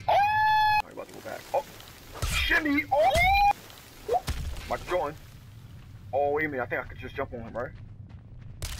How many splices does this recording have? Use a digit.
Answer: 2